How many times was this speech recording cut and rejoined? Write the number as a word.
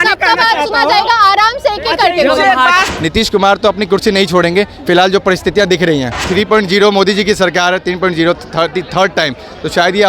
two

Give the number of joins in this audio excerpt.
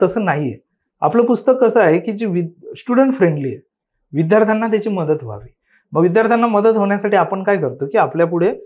zero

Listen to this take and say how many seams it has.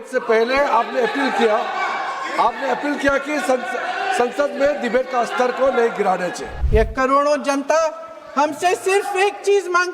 one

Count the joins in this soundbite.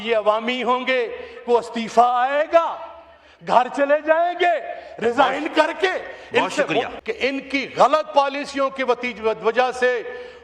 one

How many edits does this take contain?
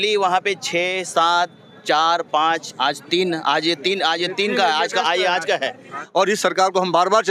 one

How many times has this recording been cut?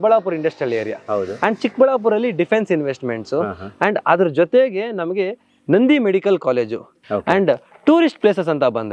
one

